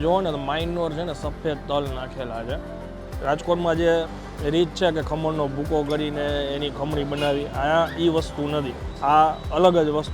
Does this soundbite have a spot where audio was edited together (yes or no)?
yes